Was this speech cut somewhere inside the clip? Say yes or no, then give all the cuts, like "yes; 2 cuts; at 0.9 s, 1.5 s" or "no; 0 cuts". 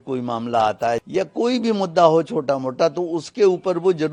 yes; 1 cut; at 1.0 s